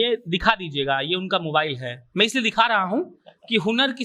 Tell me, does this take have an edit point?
no; 0 cuts

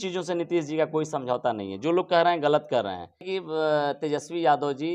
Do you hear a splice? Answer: yes; 1 cut; at 3.3 s

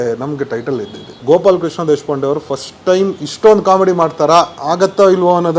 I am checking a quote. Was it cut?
yes; 2 cuts; at 1.0 s, 4.6 s

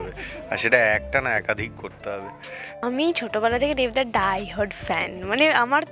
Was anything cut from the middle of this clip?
yes; 1 cut; at 2.8 s

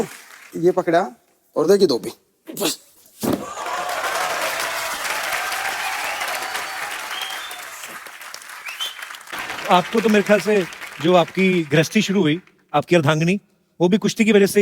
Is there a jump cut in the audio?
yes; 1 cut; at 9.3 s

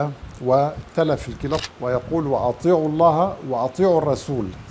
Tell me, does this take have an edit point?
yes; 1 cut; at 1.6 s

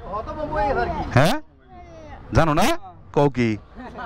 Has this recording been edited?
no; 0 cuts

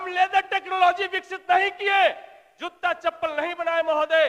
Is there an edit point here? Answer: no; 0 cuts

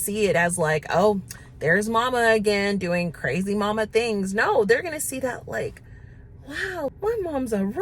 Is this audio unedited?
no; 1 cut; at 6.9 s

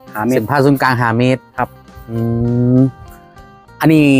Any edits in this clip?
yes; 1 cut; at 2.2 s

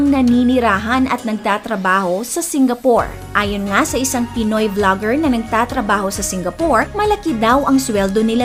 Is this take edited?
no; 0 cuts

